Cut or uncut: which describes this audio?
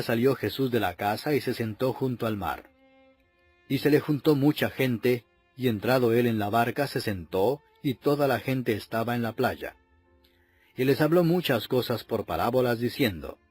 cut